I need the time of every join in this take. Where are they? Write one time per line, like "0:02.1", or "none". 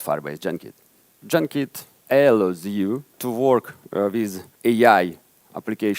0:01.1
0:02.0
0:03.2
0:04.4